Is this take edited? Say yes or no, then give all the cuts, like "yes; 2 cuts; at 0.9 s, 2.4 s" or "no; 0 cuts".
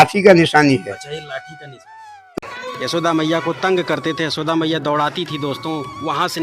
yes; 1 cut; at 2.4 s